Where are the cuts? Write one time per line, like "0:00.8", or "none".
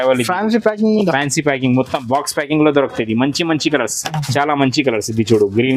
none